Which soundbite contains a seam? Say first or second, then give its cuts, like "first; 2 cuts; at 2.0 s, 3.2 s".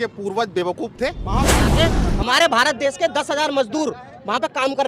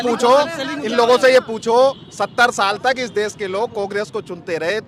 first; 1 cut; at 1.6 s